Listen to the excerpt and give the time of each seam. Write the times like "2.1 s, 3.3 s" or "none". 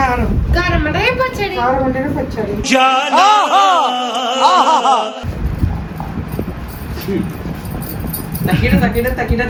none